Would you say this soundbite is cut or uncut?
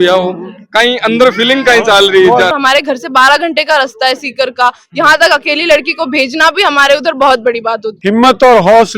cut